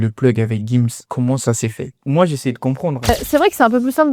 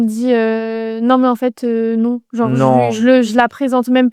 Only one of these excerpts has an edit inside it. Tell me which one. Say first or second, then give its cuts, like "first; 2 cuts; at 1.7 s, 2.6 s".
first; 3 cuts; at 1.0 s, 1.9 s, 3.1 s